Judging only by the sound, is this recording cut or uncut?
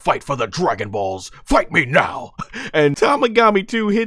cut